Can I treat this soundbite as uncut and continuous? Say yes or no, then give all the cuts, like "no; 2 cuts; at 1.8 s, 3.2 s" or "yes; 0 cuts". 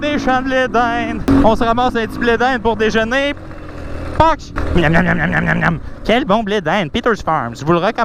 no; 2 cuts; at 1.2 s, 4.5 s